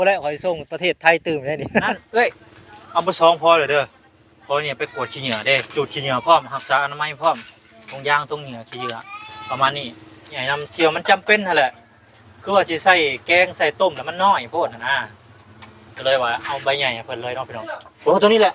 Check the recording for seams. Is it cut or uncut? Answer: cut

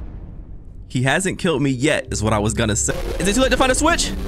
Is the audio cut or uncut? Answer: cut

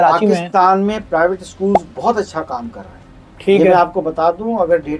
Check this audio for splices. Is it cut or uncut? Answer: uncut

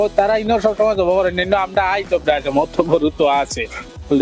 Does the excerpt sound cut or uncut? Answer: uncut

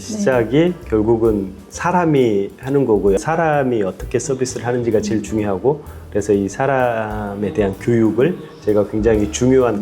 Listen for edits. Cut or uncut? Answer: uncut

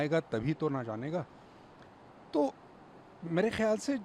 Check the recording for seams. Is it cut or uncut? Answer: uncut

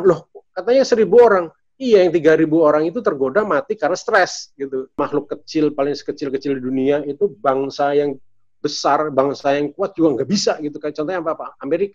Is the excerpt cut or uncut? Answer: cut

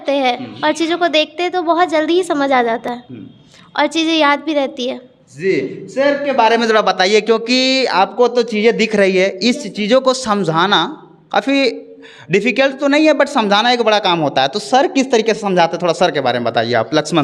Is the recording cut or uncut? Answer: uncut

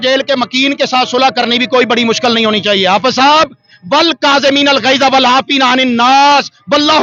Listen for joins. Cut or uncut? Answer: uncut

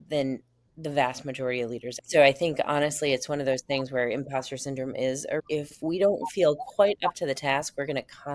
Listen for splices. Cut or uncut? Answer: cut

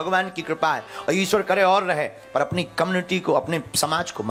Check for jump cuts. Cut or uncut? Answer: uncut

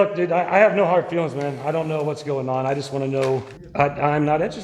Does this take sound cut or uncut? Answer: cut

